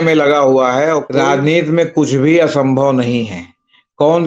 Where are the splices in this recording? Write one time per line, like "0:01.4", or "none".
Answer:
0:01.1